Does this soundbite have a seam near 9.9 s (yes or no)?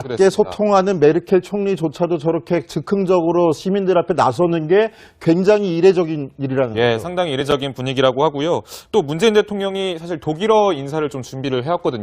yes